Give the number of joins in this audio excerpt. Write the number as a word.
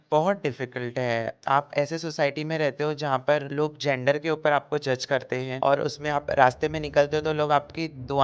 three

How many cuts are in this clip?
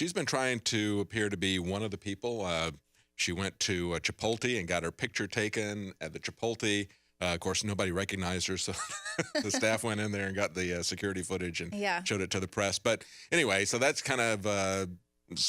one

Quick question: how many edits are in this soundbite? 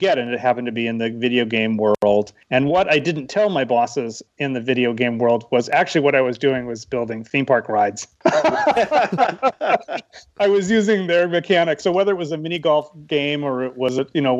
zero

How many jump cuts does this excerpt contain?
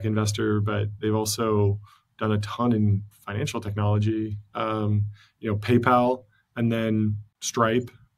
zero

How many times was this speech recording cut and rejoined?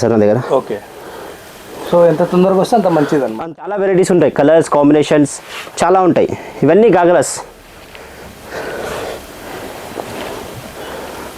one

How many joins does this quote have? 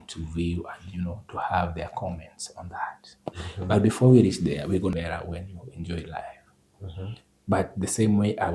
one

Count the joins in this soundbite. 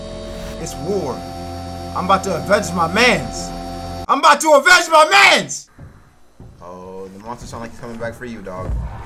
one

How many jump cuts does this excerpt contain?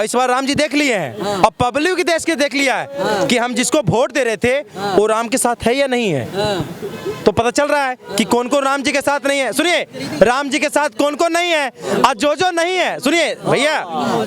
zero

